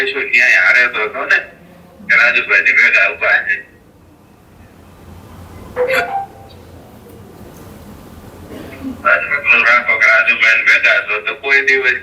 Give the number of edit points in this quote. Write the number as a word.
zero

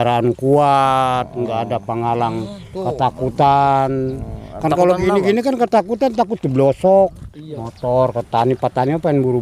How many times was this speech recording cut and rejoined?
one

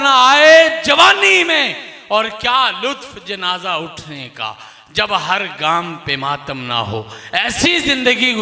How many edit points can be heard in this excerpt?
zero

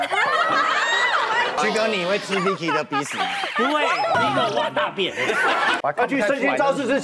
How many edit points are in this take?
three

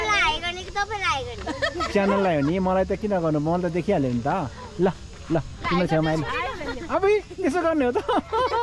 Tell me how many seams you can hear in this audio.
zero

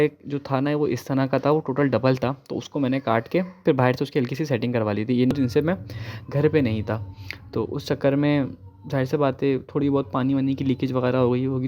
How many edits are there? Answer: one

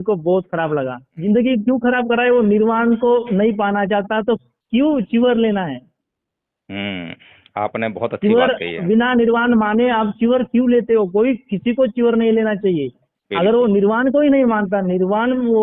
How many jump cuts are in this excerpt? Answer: one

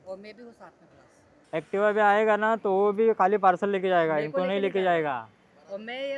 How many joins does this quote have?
one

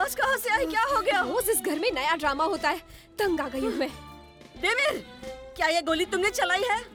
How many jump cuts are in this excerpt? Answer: zero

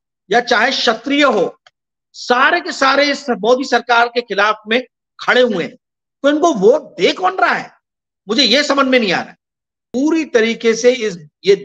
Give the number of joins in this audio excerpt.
one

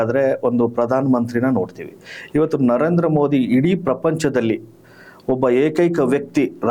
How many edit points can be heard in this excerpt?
zero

